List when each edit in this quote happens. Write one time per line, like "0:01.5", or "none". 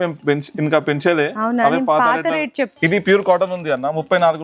0:02.7

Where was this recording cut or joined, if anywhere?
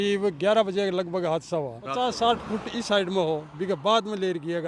0:01.9

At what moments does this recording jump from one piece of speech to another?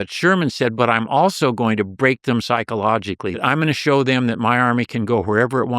0:03.4

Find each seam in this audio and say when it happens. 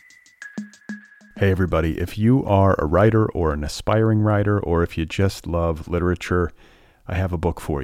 0:00.9

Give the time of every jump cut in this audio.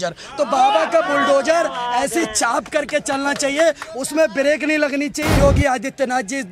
0:05.4

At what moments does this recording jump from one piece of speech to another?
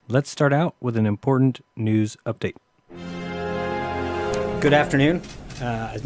0:01.1

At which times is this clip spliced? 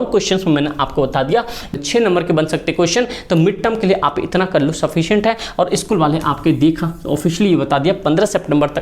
0:01.8

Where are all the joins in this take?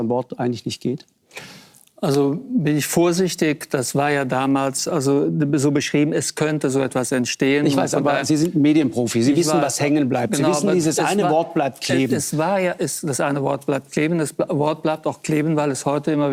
none

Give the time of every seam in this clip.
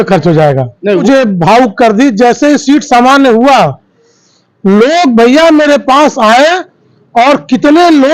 0:01.0

